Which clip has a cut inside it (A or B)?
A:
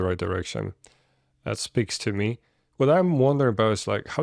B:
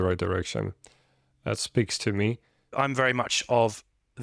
B